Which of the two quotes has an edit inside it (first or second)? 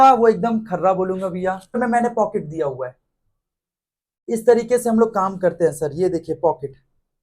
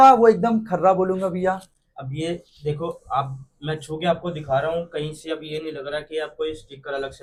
first